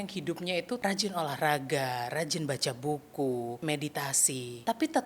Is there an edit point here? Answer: yes; 2 cuts; at 0.8 s, 4.0 s

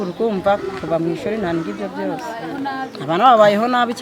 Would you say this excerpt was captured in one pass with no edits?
yes; 0 cuts

